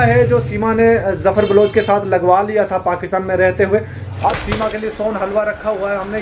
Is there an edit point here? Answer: yes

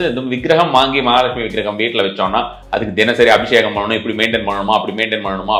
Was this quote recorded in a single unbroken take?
yes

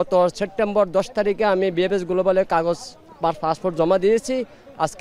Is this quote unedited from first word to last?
yes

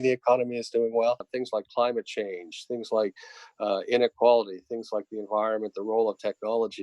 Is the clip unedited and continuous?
no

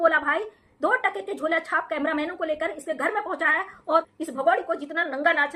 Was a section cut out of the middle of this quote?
yes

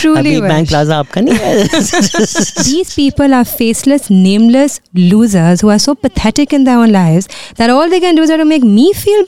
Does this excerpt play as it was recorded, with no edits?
no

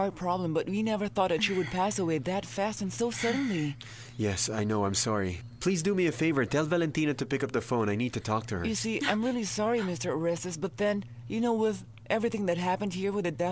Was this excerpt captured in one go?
no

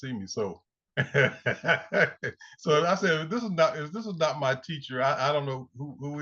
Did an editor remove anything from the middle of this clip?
no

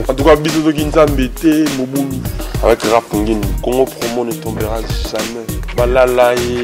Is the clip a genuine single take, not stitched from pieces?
yes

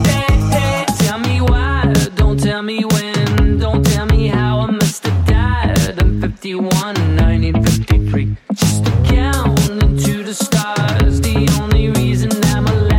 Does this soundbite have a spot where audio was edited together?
no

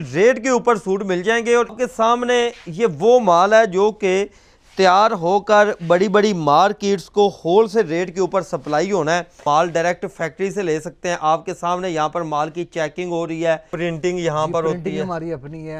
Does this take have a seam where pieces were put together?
yes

